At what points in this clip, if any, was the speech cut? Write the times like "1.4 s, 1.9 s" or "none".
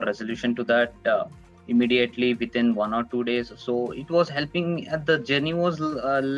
none